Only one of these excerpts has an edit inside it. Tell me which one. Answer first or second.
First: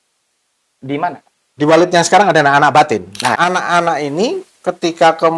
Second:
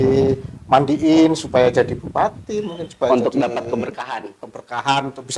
first